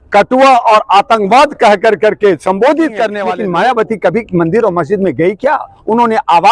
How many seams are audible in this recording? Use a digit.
1